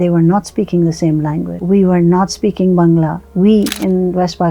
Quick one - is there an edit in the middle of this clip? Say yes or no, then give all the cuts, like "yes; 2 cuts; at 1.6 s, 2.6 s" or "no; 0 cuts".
yes; 2 cuts; at 1.5 s, 3.2 s